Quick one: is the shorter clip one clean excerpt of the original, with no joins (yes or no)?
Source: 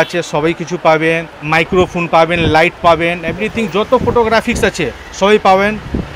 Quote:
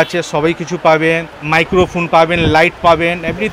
yes